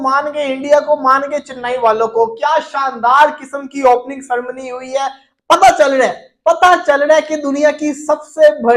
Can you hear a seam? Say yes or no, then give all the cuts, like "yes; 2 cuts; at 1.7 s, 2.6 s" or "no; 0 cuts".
no; 0 cuts